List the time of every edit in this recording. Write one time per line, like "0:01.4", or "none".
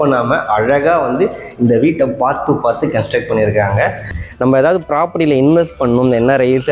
0:04.1